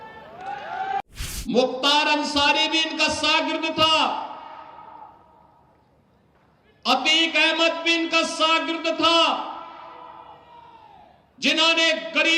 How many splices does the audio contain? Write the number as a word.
one